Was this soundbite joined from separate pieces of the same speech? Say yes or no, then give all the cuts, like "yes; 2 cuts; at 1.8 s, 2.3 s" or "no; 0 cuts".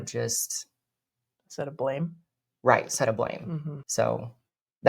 yes; 1 cut; at 3.8 s